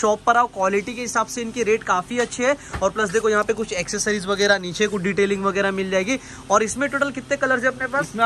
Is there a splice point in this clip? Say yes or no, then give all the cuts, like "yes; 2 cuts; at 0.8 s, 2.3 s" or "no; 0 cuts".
no; 0 cuts